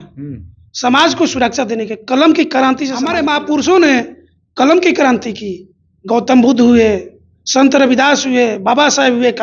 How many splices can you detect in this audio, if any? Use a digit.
1